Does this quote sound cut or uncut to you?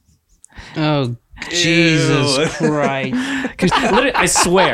cut